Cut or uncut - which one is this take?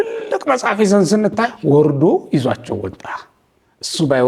cut